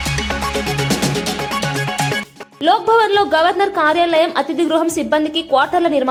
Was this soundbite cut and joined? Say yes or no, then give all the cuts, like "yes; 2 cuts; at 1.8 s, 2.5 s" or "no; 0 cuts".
no; 0 cuts